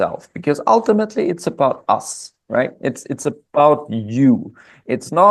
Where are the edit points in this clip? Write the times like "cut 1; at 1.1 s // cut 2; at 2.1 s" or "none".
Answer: none